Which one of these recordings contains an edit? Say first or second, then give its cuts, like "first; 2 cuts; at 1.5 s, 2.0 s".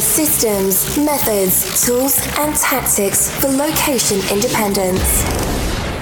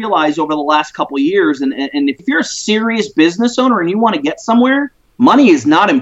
second; 2 cuts; at 2.2 s, 5.0 s